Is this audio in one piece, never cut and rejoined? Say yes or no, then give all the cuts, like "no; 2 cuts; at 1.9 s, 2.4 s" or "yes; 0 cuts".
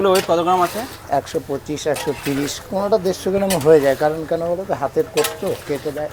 yes; 0 cuts